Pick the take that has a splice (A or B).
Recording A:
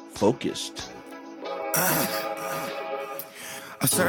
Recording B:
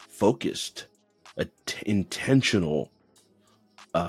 A